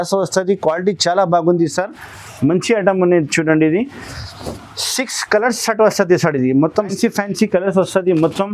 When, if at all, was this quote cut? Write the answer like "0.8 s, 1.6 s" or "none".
6.9 s